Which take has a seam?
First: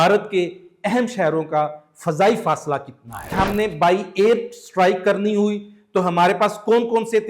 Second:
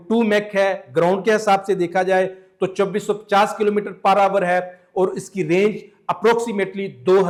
first; 1 cut; at 3.4 s

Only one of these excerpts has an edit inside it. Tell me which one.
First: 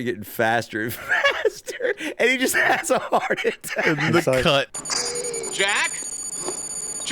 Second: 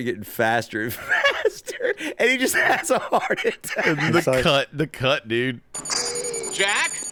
first; 1 cut; at 4.7 s

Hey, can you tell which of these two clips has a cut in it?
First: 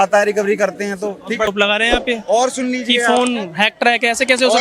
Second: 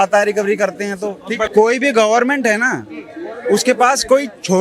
second; 1 cut; at 1.5 s

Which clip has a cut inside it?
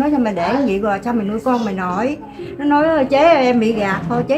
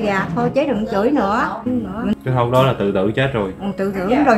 second; 1 cut; at 1.6 s

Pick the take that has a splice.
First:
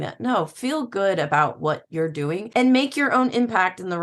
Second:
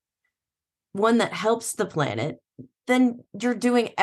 first; 1 cut; at 2.4 s

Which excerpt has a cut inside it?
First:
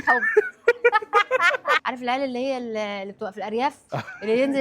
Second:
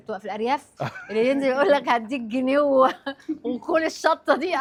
first; 1 cut; at 1.8 s

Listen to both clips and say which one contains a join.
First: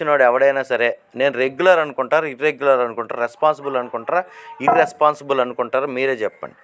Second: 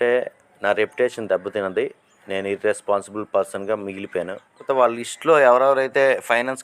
second; 1 cut; at 4.6 s

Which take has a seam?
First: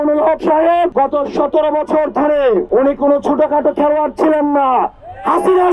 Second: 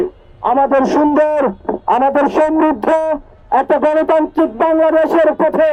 first; 2 cuts; at 0.9 s, 2.7 s

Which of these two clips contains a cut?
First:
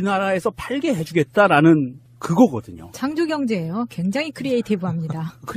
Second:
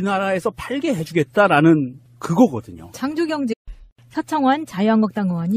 first; 1 cut; at 3.5 s

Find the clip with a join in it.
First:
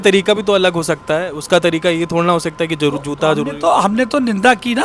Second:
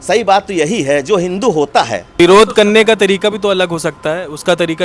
second; 1 cut; at 2.0 s

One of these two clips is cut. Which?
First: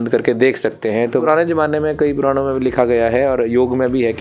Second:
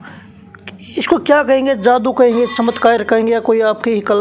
first; 1 cut; at 1.2 s

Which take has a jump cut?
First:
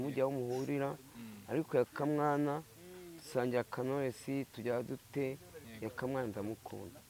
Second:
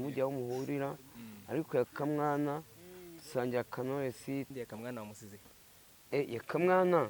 second; 1 cut; at 4.5 s

